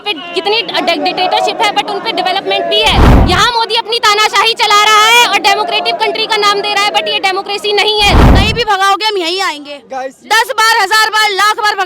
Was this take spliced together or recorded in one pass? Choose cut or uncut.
cut